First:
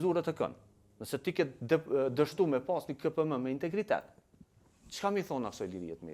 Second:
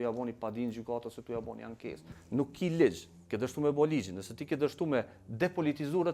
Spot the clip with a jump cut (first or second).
second